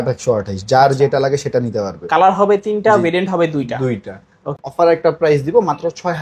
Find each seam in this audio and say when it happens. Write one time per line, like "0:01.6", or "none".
0:04.6